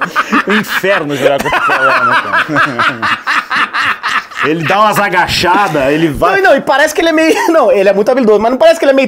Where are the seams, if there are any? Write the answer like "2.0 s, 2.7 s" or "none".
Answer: none